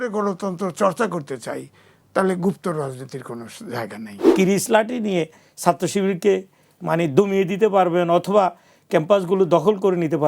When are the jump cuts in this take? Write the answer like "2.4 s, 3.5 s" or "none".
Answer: 4.2 s